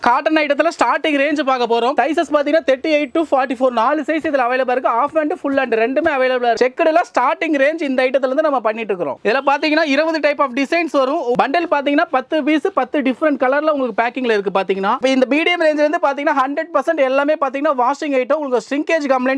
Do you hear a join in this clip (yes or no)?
yes